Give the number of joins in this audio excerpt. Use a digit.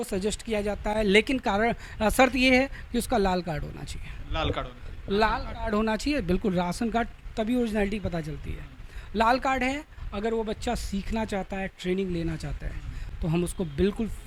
0